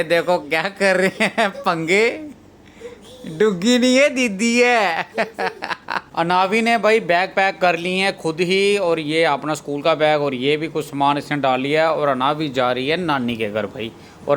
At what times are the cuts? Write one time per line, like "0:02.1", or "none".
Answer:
0:06.0